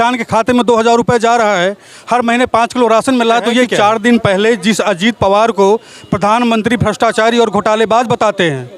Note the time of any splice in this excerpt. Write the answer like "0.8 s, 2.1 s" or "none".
3.7 s